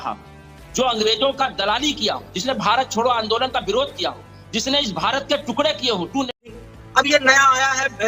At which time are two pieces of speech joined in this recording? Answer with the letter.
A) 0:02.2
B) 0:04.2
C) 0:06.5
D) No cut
C